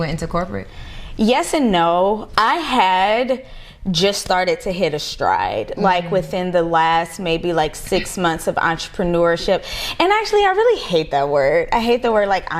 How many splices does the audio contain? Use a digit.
1